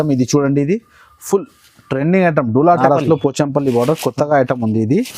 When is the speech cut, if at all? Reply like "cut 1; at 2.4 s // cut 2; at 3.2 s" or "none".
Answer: cut 1; at 2.8 s